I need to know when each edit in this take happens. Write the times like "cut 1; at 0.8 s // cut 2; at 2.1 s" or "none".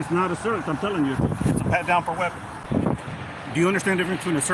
cut 1; at 2.6 s